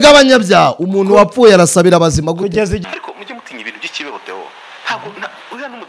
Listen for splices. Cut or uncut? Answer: cut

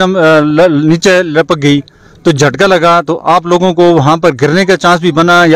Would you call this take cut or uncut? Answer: uncut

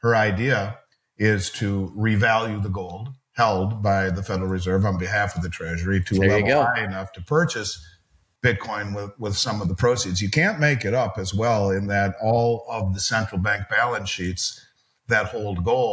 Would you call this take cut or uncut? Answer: uncut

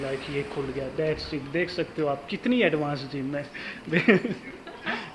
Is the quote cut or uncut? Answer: uncut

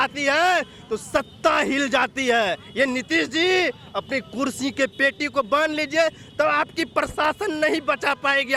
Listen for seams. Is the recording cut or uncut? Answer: uncut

